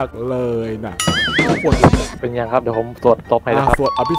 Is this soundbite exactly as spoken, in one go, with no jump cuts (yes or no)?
no